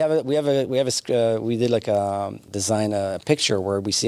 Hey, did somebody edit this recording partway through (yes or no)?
yes